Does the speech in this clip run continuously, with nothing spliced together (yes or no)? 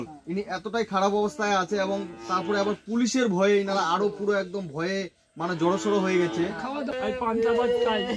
no